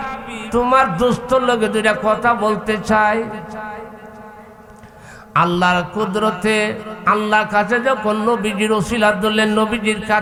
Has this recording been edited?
no; 0 cuts

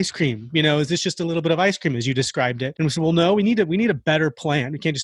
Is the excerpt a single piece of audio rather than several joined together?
no; 1 cut; at 2.7 s

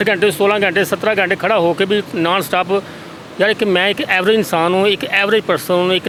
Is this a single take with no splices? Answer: yes; 0 cuts

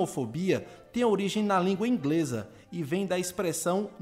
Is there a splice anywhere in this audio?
no; 0 cuts

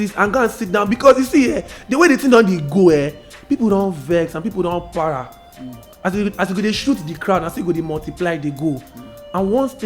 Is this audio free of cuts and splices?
yes; 0 cuts

